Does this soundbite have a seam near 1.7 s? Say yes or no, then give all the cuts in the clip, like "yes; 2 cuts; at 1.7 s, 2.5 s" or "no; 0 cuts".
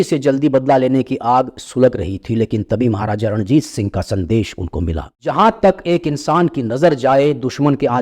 no; 1 cut; at 5.2 s